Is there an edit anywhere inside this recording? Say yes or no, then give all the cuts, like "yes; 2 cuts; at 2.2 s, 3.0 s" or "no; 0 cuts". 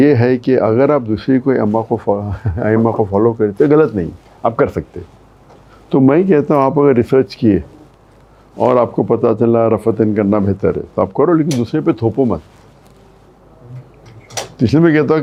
no; 0 cuts